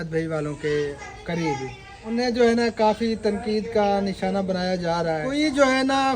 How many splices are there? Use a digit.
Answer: 2